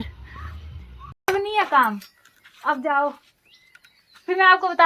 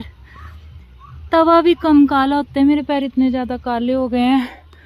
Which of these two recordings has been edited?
first; 1 cut; at 1.3 s

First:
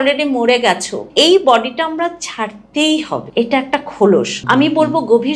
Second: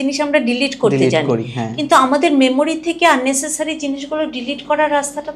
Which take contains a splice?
first; 3 cuts; at 1.1 s, 3.3 s, 4.4 s

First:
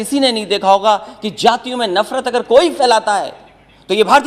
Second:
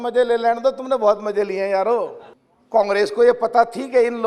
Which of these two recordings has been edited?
second; 1 cut; at 2.2 s

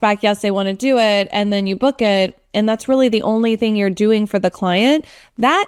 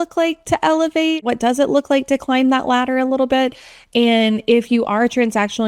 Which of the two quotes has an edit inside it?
second; 1 cut; at 1.2 s

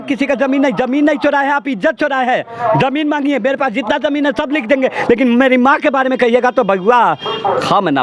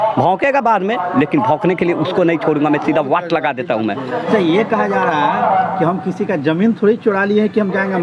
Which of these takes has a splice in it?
second; 1 cut; at 4.1 s

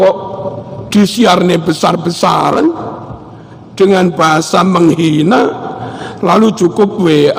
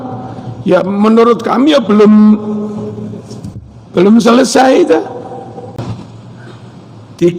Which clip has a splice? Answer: second; 1 cut; at 5.8 s

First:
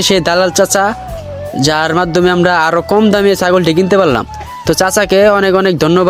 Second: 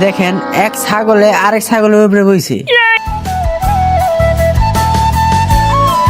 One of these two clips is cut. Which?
second; 1 cut; at 3.0 s

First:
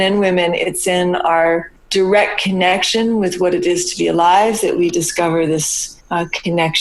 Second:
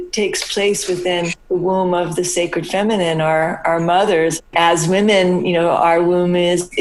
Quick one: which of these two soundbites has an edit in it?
second; 2 cuts; at 1.4 s, 4.4 s

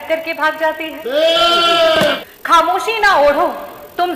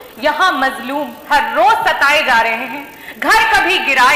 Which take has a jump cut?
first; 1 cut; at 2.2 s

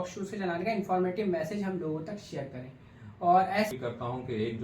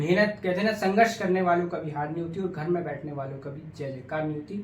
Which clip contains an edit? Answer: first; 1 cut; at 3.7 s

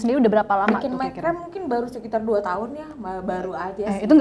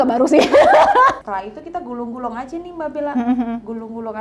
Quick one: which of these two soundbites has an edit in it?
second; 1 cut; at 1.2 s

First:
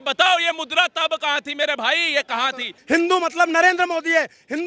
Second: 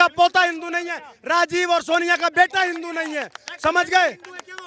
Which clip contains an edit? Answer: first; 1 cut; at 2.7 s

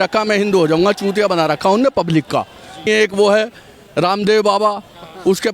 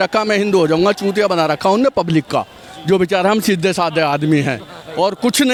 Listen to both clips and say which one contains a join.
first; 1 cut; at 2.8 s

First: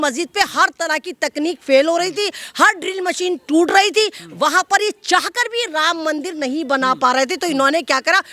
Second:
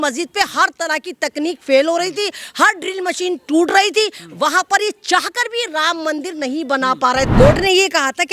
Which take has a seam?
second; 1 cut; at 7.3 s

